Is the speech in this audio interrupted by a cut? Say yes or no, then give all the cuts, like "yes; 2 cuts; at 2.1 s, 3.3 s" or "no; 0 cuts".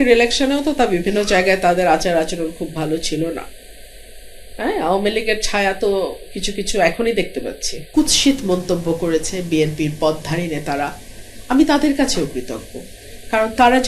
yes; 1 cut; at 7.8 s